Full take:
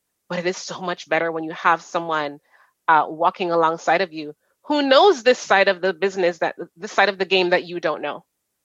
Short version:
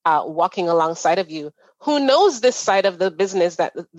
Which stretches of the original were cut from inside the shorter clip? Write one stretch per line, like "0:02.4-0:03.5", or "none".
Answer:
none